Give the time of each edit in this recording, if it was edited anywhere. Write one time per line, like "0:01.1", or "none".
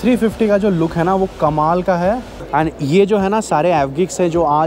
0:02.3